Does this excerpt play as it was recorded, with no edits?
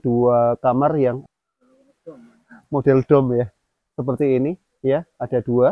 no; 1 cut; at 1.2 s

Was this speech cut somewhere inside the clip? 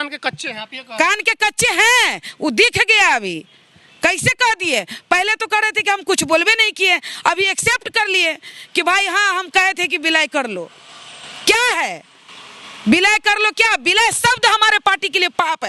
no; 0 cuts

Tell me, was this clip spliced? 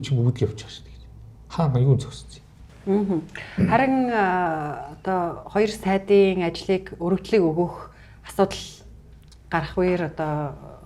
no; 0 cuts

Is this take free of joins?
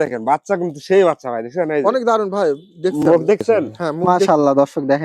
no; 1 cut; at 4.0 s

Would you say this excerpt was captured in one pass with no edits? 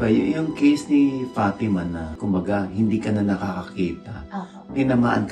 yes; 0 cuts

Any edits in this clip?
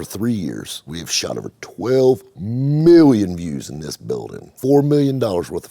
yes; 2 cuts; at 0.9 s, 4.4 s

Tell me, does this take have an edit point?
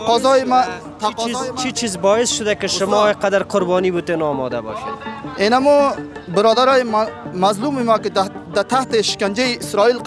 no; 0 cuts

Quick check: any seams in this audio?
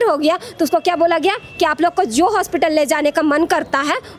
no; 0 cuts

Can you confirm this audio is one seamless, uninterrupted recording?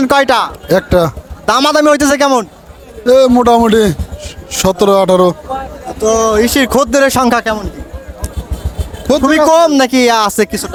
yes; 0 cuts

